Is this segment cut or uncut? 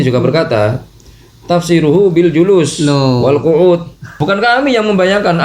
cut